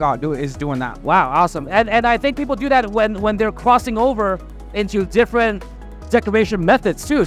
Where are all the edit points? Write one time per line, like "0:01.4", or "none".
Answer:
none

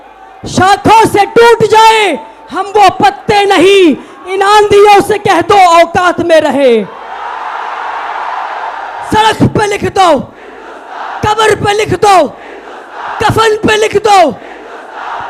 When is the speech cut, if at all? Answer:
0:09.0

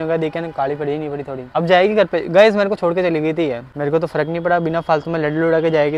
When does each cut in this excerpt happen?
0:01.4
0:03.6

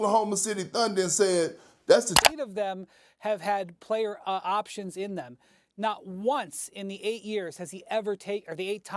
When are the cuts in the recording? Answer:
0:02.2

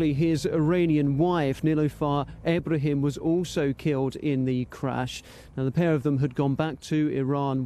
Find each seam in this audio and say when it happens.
none

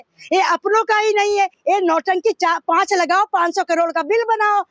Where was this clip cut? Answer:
0:01.6

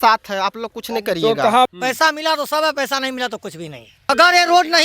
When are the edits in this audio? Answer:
0:01.7
0:04.1

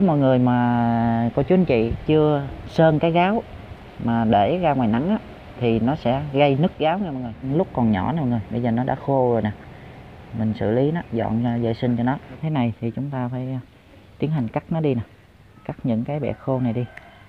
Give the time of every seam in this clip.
0:07.5
0:12.4

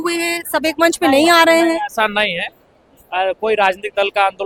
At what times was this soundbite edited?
none

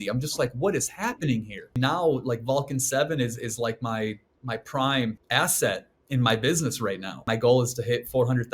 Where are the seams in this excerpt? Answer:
0:01.8
0:05.2
0:07.2

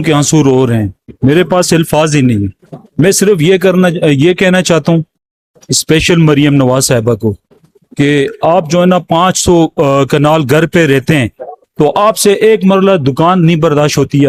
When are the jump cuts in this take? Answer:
none

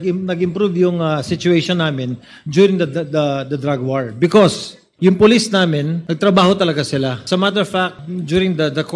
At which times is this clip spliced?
0:04.8
0:06.0
0:07.2
0:08.1

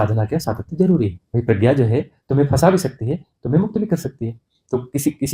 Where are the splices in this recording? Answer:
0:01.2

